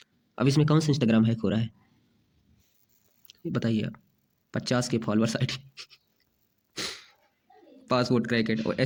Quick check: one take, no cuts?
yes; 0 cuts

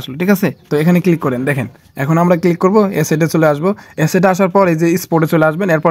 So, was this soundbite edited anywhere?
no; 0 cuts

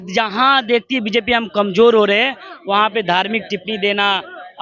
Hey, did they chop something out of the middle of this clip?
no; 0 cuts

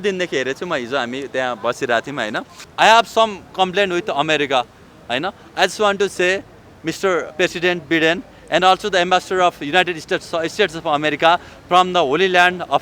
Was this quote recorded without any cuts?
no; 1 cut; at 2.6 s

